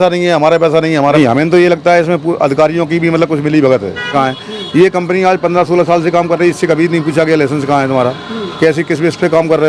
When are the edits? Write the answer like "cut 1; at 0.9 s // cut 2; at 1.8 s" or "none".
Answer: cut 1; at 1.2 s // cut 2; at 4.1 s